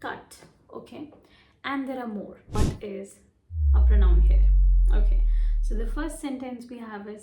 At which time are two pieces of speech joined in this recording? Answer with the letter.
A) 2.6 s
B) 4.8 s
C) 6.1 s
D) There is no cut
A